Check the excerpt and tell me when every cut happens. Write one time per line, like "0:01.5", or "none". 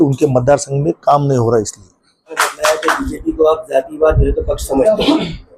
0:02.3